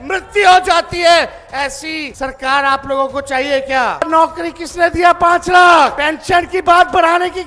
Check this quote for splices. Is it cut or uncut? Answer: cut